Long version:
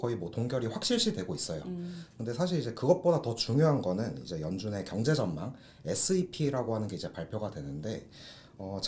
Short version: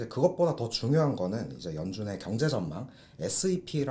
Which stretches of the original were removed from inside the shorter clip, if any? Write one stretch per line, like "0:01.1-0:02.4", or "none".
none